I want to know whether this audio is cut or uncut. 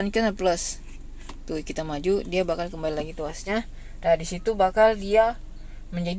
uncut